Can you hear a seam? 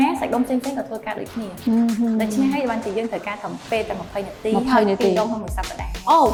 no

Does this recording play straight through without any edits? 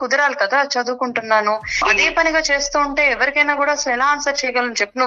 no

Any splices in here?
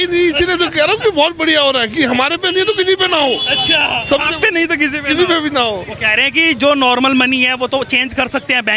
no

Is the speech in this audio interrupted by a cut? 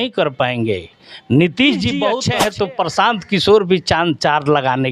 yes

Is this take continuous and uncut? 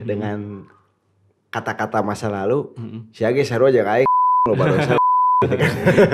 yes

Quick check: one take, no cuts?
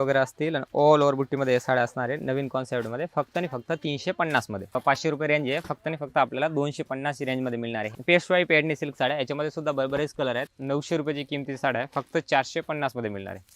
no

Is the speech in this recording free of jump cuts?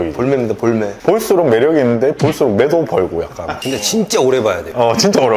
no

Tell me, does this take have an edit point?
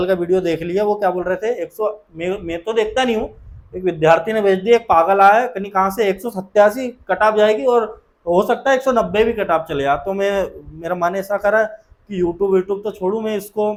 no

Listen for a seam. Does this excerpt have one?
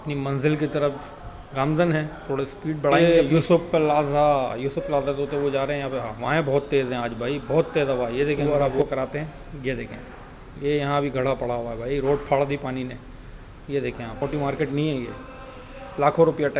yes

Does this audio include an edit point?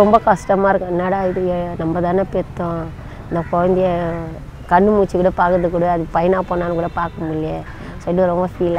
no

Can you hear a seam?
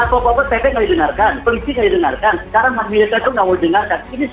yes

